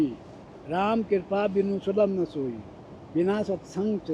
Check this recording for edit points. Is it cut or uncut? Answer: uncut